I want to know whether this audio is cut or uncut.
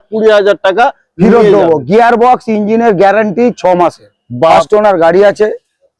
cut